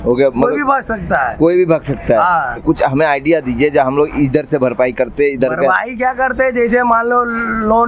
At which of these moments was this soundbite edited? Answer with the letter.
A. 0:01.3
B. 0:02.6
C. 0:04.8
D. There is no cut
B